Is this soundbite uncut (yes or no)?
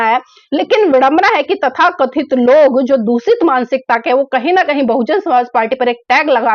yes